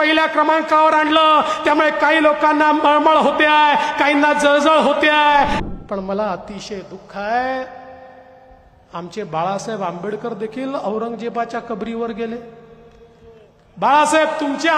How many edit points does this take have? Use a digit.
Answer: 1